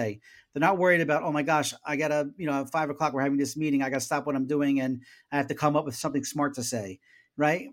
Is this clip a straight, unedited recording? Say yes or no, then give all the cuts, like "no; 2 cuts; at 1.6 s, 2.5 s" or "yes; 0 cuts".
yes; 0 cuts